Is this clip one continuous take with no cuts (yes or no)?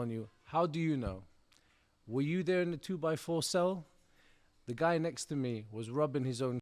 yes